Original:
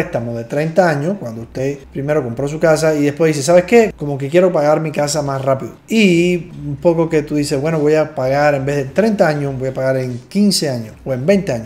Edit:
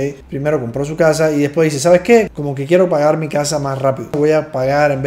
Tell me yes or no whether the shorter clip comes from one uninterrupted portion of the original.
no